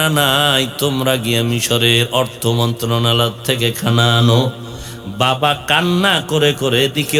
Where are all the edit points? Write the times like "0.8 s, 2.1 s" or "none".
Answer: none